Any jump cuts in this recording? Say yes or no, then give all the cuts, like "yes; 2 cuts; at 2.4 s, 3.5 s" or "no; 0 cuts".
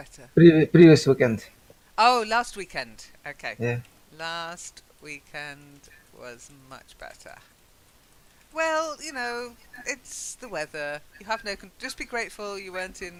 no; 0 cuts